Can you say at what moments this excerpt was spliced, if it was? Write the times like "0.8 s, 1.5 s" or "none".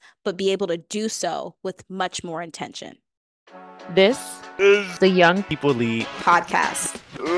3.2 s